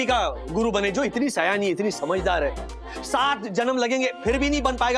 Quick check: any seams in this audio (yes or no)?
no